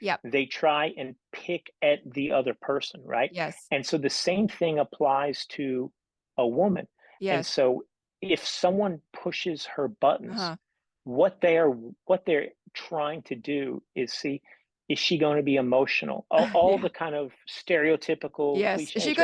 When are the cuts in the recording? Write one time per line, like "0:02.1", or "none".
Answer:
none